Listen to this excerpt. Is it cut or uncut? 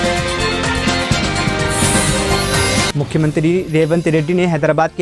cut